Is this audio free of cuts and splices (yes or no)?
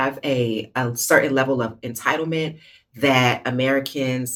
yes